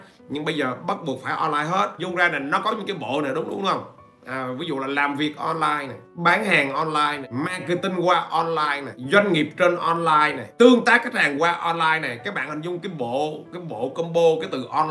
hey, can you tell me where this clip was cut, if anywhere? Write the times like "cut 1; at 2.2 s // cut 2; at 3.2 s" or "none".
cut 1; at 2.0 s // cut 2; at 6.0 s // cut 3; at 7.2 s // cut 4; at 8.9 s // cut 5; at 10.4 s